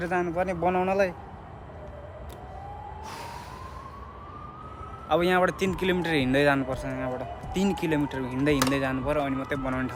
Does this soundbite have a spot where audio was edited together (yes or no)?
no